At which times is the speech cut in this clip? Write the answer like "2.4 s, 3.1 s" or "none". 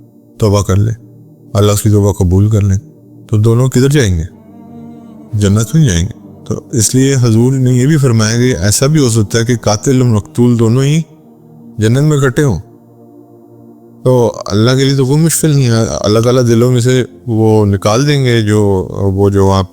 12.6 s, 14.0 s